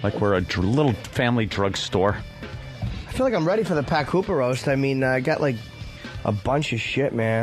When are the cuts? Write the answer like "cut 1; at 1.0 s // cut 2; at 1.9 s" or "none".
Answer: cut 1; at 3.3 s